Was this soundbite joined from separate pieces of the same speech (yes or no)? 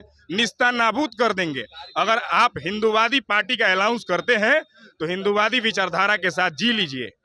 no